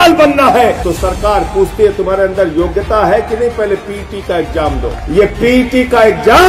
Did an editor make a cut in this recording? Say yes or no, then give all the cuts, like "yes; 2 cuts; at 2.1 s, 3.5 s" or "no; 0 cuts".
yes; 2 cuts; at 0.9 s, 4.9 s